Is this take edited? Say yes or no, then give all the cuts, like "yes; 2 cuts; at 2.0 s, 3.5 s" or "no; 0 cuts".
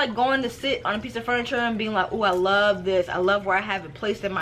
no; 0 cuts